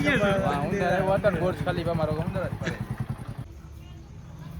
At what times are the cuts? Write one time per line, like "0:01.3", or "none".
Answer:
0:03.5